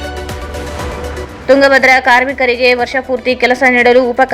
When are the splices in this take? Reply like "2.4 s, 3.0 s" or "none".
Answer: 1.0 s